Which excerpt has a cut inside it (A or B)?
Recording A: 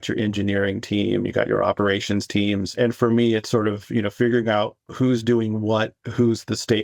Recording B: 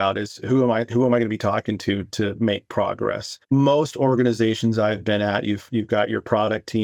A